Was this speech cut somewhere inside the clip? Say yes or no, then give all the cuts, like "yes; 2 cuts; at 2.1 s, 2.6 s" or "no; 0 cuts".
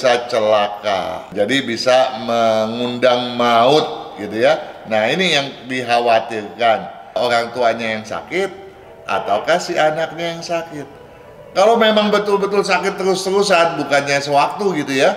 yes; 2 cuts; at 1.3 s, 7.0 s